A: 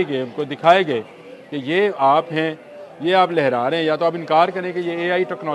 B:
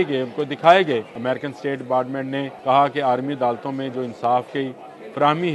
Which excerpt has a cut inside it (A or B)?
B